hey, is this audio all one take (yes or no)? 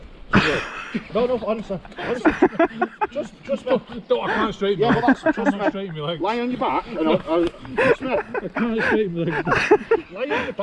yes